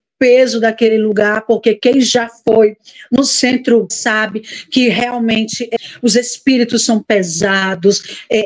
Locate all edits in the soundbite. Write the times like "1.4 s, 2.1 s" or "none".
4.0 s, 5.7 s